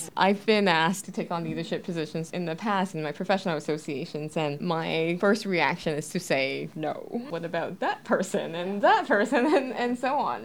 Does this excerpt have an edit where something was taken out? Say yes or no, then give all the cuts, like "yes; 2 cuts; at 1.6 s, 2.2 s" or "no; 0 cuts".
yes; 1 cut; at 2.9 s